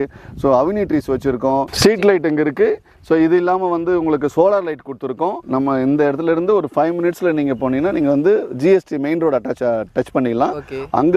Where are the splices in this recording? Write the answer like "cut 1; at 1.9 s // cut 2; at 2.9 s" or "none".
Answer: cut 1; at 5.4 s

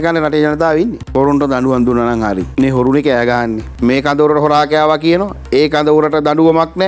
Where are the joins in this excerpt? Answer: cut 1; at 1.0 s // cut 2; at 2.5 s // cut 3; at 3.6 s

